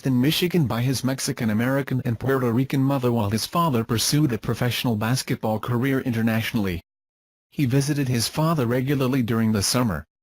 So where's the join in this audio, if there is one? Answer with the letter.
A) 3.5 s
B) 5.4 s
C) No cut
B